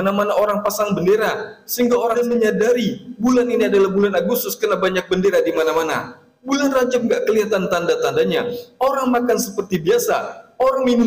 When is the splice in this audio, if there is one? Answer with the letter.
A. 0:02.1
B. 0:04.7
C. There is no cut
A